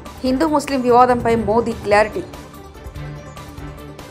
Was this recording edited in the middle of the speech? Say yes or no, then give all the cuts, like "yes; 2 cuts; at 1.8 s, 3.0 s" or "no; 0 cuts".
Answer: no; 0 cuts